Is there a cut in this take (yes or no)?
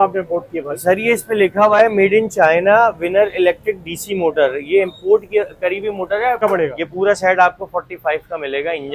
yes